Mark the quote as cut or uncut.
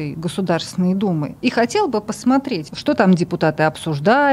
cut